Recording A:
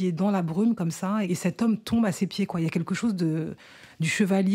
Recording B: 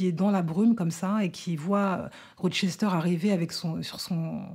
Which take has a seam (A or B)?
A